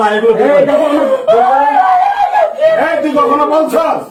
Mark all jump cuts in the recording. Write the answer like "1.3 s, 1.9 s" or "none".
none

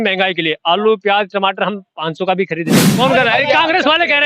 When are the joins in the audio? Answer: 2.8 s

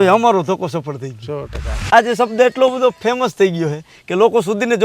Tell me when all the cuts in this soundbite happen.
1.9 s

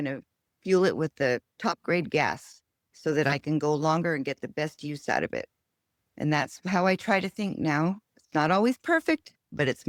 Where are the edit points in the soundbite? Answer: none

